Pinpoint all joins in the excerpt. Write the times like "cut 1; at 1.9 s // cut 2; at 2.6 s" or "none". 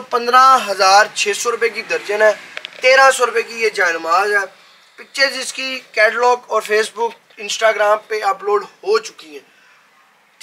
none